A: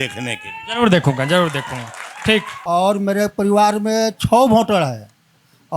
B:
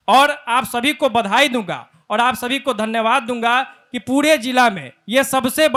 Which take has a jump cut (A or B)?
A